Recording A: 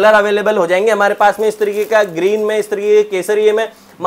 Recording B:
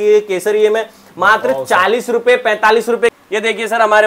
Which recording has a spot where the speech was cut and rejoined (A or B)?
B